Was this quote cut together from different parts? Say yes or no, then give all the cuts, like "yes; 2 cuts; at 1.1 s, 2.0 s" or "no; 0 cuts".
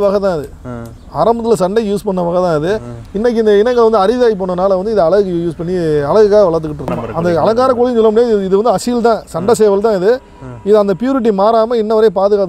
yes; 1 cut; at 7.0 s